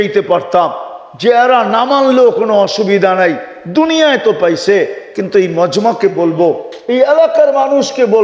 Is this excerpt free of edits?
yes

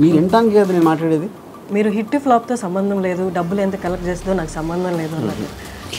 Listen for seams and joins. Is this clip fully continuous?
no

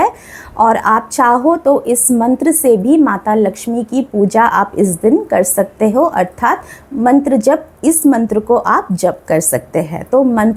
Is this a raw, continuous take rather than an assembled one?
yes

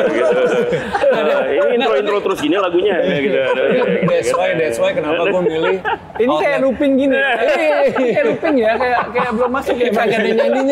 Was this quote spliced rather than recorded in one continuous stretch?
no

